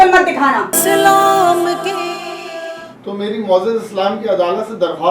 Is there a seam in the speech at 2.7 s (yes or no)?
yes